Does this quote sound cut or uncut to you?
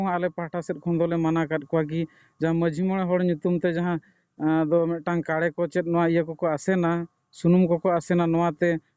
uncut